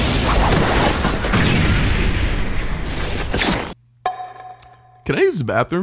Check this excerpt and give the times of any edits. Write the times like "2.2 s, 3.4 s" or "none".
none

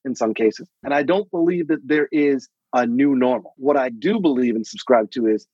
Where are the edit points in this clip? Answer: 0.8 s, 3.6 s

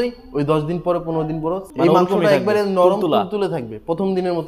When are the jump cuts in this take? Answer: 1.6 s

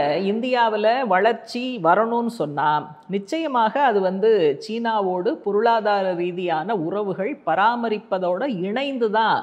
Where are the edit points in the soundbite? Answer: none

